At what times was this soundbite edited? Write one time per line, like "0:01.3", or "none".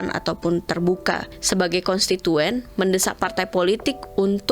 0:01.3